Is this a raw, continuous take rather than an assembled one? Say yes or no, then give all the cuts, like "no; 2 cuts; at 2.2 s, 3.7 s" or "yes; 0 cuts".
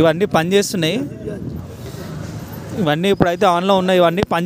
yes; 0 cuts